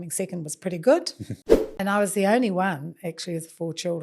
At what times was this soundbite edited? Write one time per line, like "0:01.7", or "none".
0:01.6